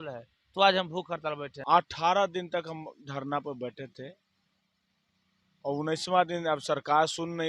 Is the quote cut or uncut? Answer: cut